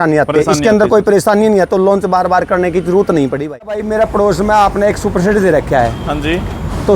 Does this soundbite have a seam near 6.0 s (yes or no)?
no